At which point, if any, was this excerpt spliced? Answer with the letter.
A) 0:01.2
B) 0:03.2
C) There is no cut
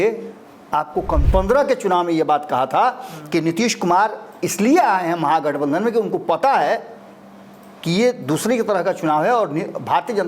A